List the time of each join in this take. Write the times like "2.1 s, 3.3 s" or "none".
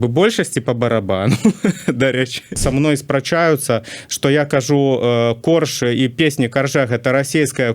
2.5 s